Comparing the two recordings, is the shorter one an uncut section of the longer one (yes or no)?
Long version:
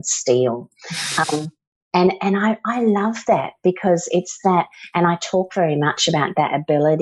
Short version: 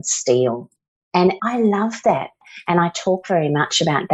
no